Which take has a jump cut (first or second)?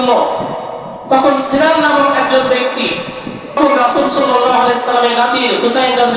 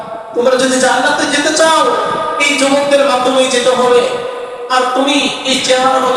first